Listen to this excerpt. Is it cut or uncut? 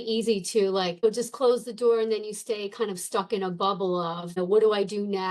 cut